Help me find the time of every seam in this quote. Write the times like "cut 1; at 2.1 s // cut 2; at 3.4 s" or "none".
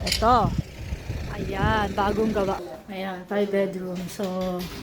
cut 1; at 2.7 s